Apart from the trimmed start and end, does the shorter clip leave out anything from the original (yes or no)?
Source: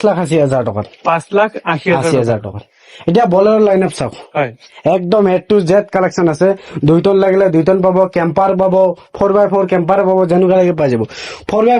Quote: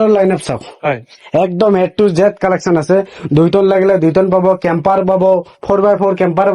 no